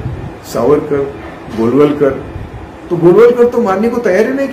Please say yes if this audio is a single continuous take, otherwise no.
yes